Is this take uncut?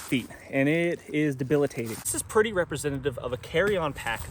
no; 1 cut; at 2.2 s

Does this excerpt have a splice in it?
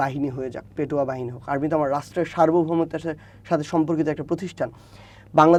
no; 0 cuts

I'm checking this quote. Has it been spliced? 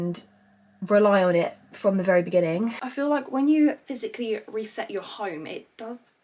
yes; 1 cut; at 2.8 s

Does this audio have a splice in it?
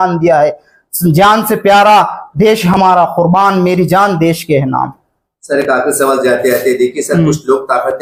no; 0 cuts

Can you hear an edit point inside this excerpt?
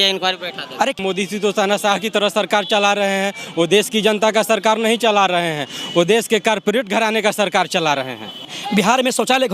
yes; 2 cuts; at 1.0 s, 8.6 s

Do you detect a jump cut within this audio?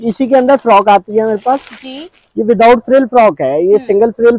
no; 0 cuts

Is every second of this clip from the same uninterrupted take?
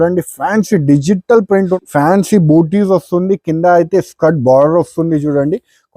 no; 1 cut; at 1.8 s

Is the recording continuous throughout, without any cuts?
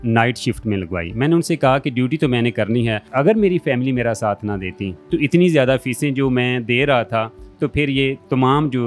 no; 1 cut; at 3.1 s

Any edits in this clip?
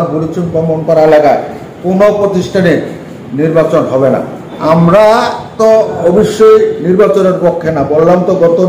yes; 1 cut; at 4.5 s

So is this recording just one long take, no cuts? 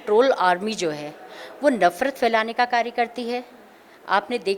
yes; 0 cuts

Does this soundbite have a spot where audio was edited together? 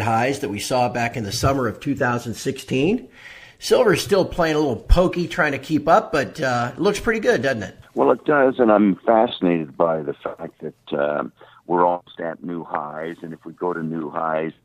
no; 0 cuts

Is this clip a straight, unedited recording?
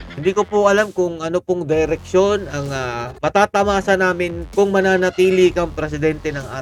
yes; 0 cuts

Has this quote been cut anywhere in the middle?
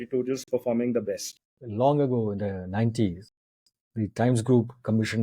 yes; 1 cut; at 1.5 s

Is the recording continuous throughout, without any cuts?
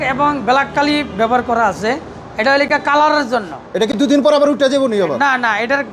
yes; 0 cuts

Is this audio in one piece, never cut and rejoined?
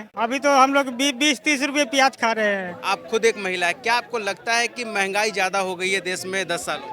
no; 1 cut; at 2.8 s

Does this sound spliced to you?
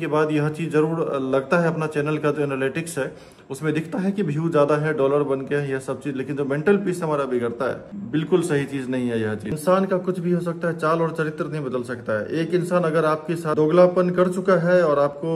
yes; 3 cuts; at 7.9 s, 9.6 s, 13.5 s

